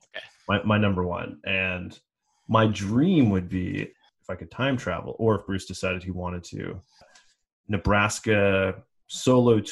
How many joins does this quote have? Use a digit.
2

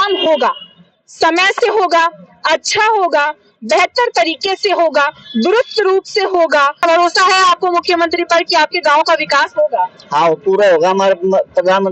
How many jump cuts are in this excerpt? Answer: 1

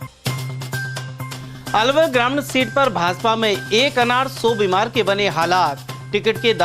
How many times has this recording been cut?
1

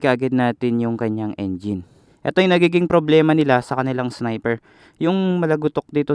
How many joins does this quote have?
1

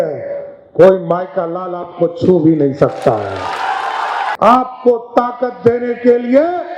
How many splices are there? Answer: 1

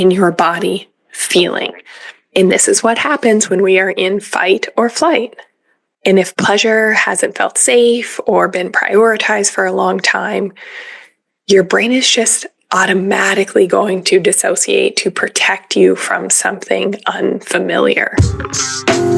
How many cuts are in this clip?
1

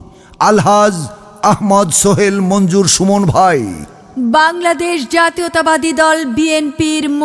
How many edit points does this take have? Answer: 1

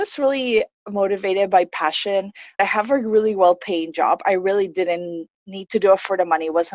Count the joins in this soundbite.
1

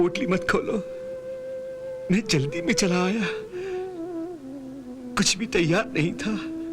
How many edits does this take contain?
1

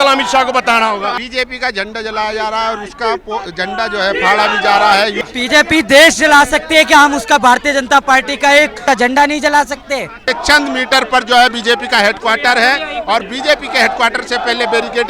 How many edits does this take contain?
4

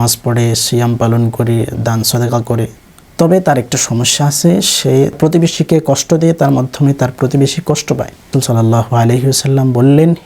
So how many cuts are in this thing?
3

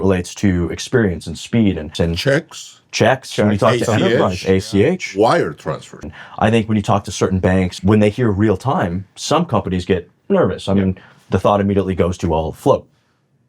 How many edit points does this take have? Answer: 3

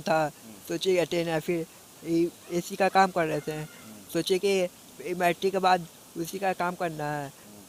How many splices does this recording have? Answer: 0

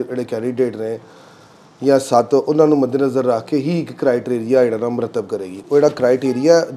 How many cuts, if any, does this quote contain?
0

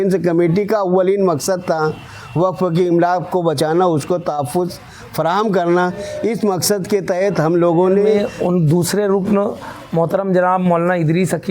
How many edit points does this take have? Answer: 1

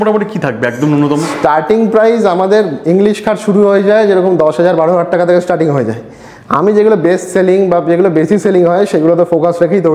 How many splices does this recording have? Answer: 0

